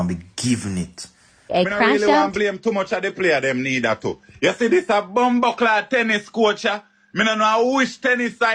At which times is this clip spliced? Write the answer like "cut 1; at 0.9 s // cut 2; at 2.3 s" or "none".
cut 1; at 1.5 s